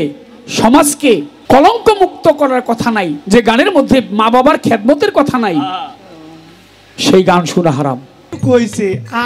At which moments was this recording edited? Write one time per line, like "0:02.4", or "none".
0:01.3
0:08.2